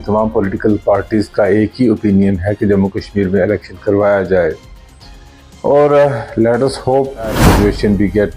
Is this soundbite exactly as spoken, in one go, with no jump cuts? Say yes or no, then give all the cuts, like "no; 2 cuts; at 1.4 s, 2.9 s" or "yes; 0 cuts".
no; 1 cut; at 7.4 s